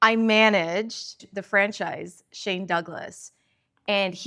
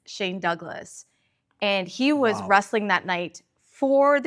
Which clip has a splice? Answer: first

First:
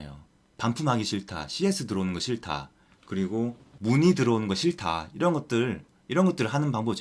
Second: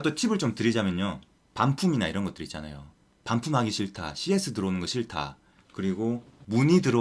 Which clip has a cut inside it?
second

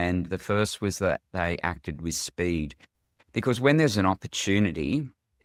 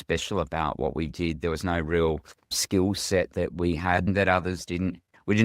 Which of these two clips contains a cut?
second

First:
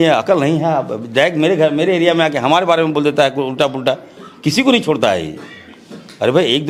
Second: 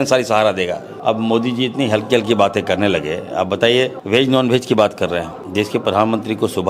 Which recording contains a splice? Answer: second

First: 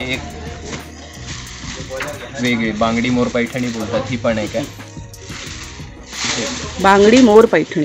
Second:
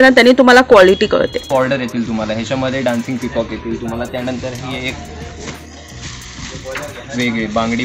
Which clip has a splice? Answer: second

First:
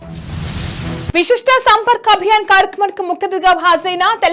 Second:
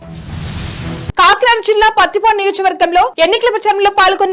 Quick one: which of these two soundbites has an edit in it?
first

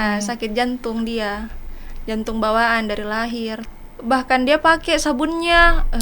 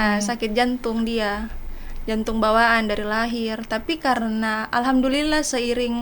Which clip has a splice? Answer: first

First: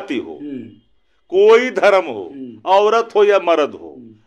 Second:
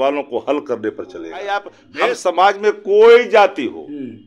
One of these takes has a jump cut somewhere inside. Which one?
second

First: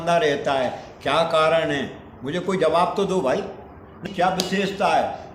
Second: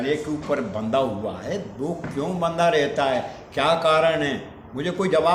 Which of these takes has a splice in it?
first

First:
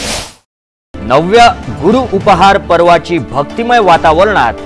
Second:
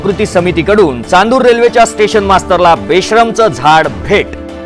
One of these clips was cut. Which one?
first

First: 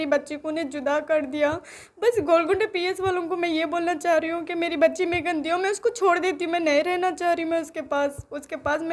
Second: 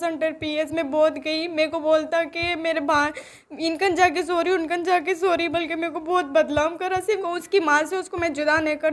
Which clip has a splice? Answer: second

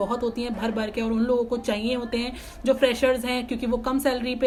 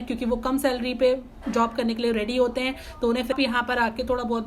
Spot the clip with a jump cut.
second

